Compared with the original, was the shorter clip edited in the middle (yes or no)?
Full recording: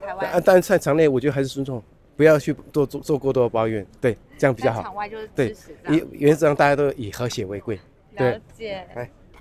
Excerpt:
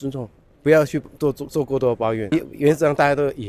yes